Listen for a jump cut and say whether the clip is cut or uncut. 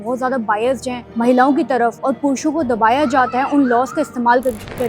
cut